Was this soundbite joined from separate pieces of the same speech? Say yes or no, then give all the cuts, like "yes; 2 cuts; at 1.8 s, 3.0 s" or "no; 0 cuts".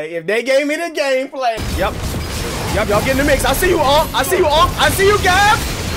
yes; 1 cut; at 1.6 s